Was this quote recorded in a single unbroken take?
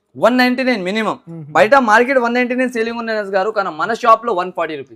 yes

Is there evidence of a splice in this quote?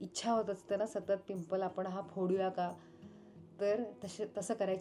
no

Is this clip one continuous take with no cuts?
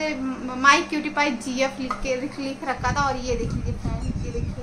yes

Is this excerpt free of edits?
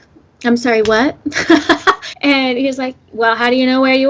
no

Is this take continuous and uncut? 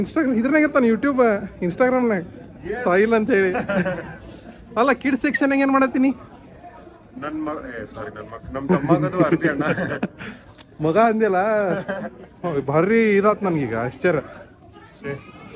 yes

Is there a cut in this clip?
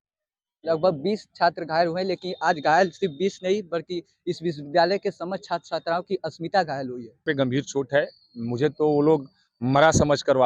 yes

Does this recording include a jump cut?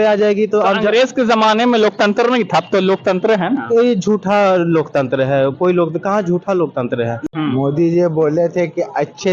yes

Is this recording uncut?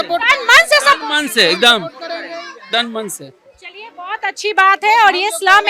yes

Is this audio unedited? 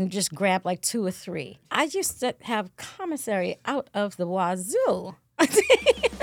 no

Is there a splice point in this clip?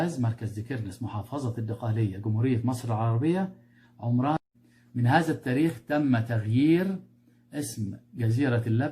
yes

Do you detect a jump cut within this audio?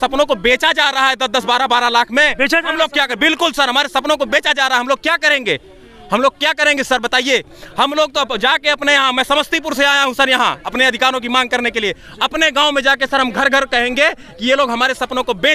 no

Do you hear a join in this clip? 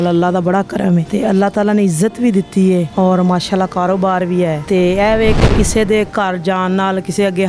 yes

